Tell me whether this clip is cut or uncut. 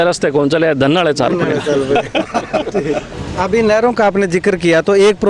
cut